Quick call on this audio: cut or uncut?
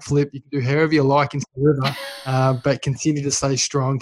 uncut